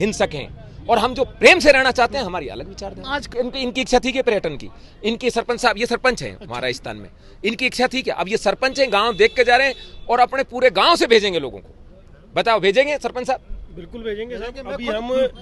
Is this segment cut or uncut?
cut